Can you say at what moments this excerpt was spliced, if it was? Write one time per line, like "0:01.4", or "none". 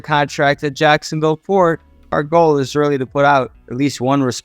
0:02.1